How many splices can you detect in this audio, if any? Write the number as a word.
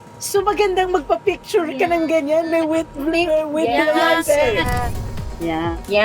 one